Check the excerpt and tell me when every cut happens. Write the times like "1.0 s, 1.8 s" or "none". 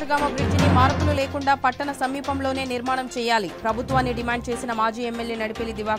none